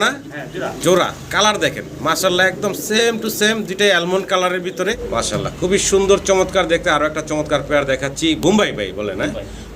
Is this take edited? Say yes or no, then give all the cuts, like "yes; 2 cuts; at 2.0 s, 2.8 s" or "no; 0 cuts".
yes; 1 cut; at 5.0 s